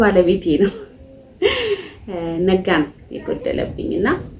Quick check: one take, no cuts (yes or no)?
yes